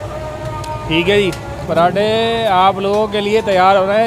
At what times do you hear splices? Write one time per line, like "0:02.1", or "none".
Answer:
0:01.7